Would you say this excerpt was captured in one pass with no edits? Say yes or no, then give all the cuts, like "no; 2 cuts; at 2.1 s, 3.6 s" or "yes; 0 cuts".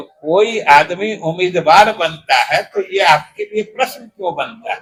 yes; 0 cuts